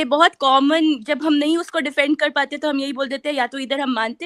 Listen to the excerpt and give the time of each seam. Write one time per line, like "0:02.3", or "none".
none